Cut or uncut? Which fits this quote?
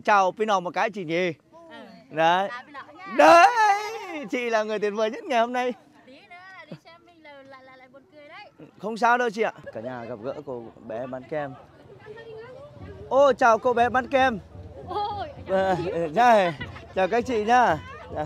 cut